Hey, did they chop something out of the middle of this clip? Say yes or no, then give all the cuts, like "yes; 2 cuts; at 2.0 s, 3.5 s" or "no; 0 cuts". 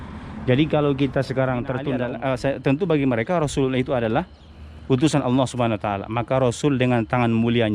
yes; 1 cut; at 2.4 s